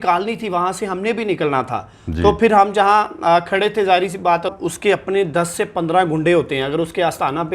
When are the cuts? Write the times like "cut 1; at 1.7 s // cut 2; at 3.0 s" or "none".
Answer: cut 1; at 4.5 s